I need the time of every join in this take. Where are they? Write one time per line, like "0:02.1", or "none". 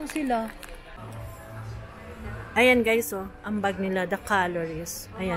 0:01.0